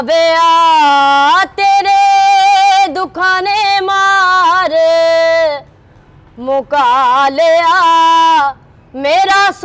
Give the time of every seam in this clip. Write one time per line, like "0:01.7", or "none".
none

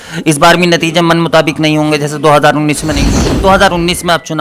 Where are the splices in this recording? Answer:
0:03.2

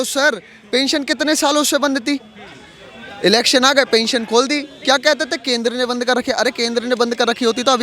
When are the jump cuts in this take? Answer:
none

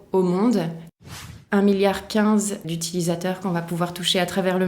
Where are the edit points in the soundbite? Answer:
0:01.1
0:02.6

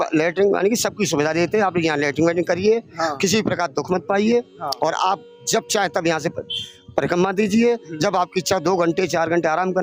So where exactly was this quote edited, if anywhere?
none

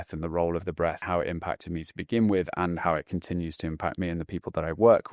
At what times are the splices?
0:01.0

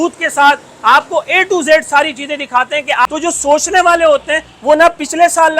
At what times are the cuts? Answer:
0:03.1

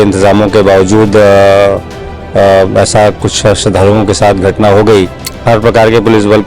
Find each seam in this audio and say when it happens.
0:05.3

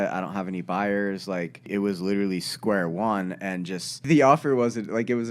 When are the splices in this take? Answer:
0:01.7
0:04.0

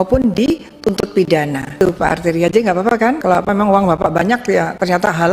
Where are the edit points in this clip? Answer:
0:01.8
0:03.2

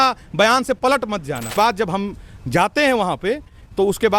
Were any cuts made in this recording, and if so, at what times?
0:01.5

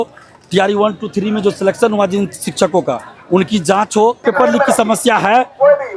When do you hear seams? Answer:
0:04.2

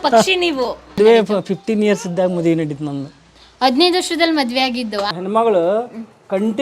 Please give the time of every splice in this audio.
0:01.0
0:05.1

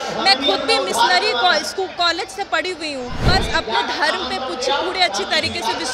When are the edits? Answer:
0:03.3

